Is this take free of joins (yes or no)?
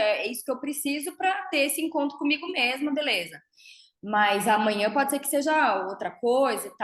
yes